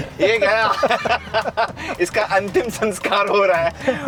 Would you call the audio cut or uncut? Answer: uncut